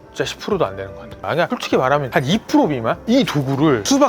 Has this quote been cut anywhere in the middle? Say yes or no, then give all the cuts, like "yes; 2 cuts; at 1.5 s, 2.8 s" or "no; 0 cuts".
yes; 2 cuts; at 1.2 s, 3.0 s